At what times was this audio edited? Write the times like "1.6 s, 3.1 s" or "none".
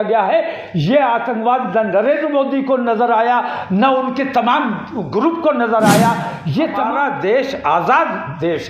6.9 s